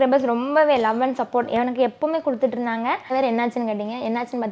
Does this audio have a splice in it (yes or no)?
yes